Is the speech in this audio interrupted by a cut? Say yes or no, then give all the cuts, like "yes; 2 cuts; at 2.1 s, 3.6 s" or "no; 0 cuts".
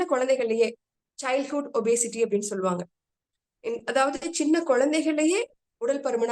no; 0 cuts